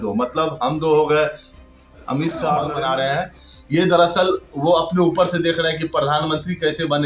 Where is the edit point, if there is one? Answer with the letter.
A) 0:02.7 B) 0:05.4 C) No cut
A